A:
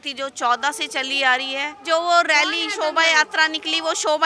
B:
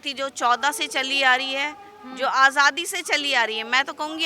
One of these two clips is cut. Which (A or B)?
A